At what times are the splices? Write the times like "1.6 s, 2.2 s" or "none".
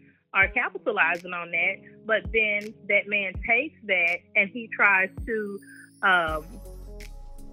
6.6 s